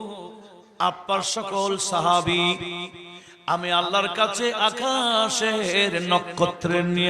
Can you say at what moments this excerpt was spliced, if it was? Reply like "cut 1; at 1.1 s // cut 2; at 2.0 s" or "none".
none